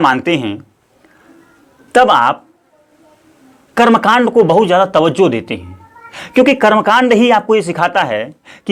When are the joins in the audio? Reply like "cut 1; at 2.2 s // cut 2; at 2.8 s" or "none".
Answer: none